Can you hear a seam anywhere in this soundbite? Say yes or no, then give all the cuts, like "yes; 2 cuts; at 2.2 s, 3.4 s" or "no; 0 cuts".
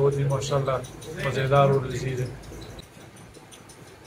no; 0 cuts